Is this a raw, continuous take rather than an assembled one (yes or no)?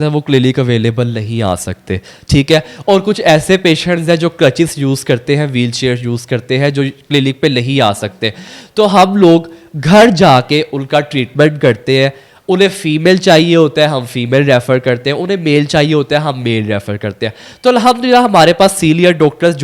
yes